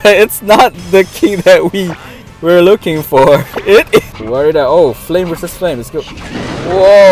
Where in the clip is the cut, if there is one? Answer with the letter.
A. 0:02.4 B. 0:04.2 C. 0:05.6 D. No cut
B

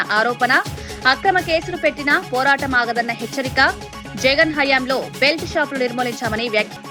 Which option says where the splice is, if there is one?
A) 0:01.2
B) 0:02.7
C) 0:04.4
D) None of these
D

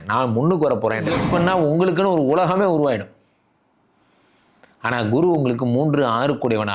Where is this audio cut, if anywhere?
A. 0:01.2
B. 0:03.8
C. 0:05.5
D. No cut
A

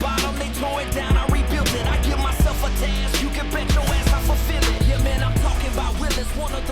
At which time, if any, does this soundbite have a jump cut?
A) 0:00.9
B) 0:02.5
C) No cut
C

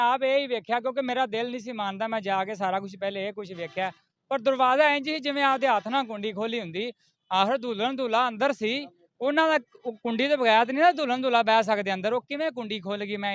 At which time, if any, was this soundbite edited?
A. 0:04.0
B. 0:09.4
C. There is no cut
C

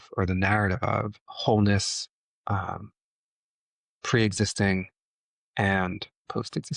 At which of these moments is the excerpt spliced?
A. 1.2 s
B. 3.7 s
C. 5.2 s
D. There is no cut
A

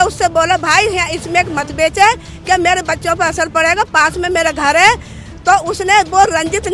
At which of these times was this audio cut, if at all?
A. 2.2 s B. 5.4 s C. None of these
C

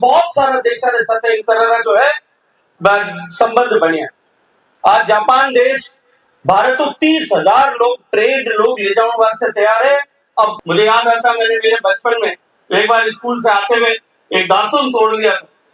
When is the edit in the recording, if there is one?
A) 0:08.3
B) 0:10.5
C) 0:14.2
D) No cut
B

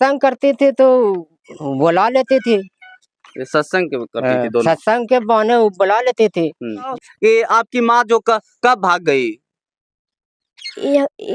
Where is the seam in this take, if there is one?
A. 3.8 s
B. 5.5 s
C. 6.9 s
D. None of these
C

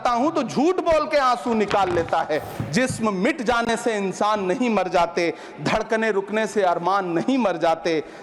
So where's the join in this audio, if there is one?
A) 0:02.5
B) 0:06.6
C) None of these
A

